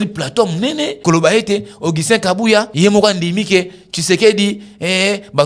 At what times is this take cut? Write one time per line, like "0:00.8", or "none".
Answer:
0:00.9
0:02.7